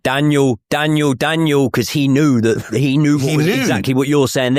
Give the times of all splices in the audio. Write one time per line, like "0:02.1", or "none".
none